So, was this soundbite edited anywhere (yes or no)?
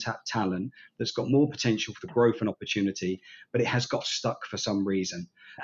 no